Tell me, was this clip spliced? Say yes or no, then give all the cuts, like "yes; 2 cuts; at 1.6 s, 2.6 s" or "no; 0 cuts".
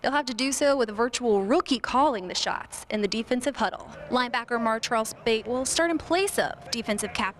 no; 0 cuts